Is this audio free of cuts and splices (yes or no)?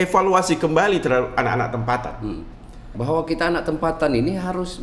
no